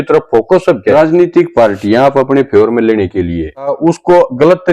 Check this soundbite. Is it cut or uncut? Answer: cut